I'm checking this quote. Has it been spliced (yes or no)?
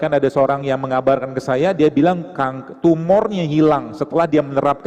no